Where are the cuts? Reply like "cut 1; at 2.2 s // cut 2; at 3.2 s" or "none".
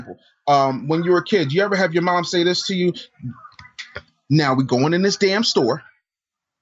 none